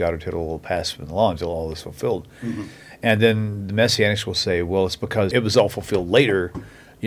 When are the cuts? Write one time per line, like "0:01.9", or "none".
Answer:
none